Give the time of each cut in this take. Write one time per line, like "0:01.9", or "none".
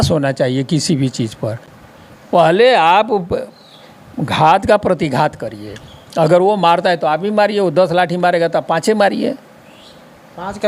0:01.7